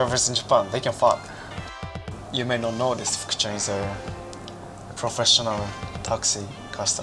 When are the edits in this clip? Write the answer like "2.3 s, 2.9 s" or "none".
2.0 s